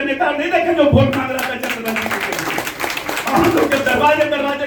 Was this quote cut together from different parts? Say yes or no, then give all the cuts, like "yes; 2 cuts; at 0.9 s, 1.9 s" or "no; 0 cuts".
no; 0 cuts